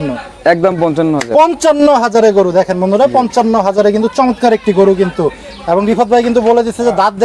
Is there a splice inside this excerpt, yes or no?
no